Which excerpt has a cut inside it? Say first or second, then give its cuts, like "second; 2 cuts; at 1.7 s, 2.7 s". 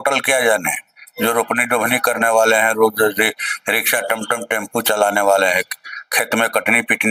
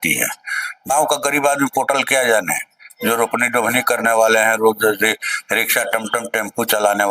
second; 1 cut; at 0.9 s